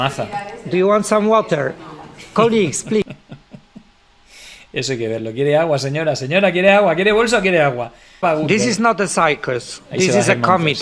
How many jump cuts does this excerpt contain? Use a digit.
1